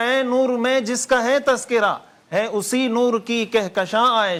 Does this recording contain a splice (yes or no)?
no